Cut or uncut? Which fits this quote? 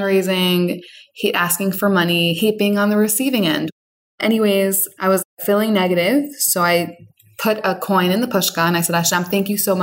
cut